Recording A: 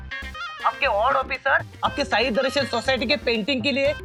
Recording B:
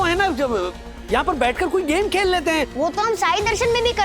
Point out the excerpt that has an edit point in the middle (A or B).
B